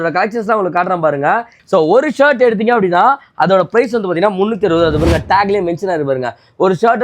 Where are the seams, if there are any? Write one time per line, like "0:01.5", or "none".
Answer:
0:01.5